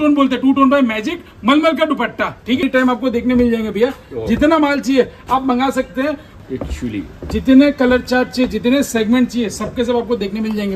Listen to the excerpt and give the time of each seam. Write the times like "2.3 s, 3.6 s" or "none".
2.6 s, 6.3 s